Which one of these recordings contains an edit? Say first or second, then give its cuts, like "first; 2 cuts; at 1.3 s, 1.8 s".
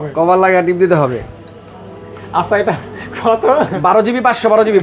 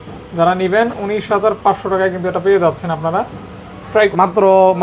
second; 1 cut; at 3.9 s